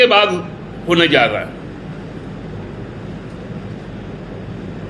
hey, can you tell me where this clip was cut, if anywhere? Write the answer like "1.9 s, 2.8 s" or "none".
none